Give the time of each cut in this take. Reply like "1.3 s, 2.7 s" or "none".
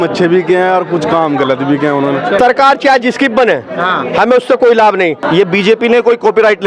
2.4 s, 5.2 s